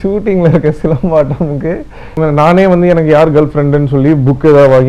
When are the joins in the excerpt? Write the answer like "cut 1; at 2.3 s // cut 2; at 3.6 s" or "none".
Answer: cut 1; at 2.2 s